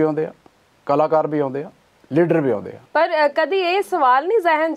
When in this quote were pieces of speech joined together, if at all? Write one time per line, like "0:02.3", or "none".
0:02.8